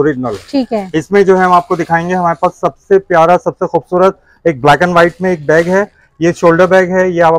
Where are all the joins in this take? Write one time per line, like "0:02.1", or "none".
none